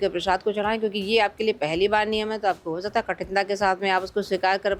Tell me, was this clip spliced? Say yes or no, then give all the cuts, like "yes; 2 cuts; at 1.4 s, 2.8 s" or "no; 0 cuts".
no; 0 cuts